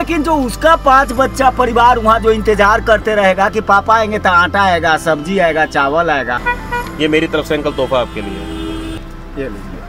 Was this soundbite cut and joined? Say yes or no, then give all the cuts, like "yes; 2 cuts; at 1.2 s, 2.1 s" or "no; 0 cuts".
yes; 2 cuts; at 6.4 s, 9.0 s